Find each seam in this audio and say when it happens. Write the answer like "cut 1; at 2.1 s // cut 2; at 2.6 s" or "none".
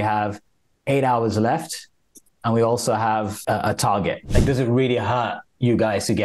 cut 1; at 3.3 s // cut 2; at 4.2 s